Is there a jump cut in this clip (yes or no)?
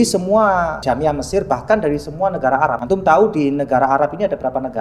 yes